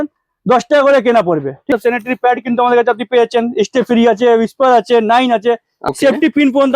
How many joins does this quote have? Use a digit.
2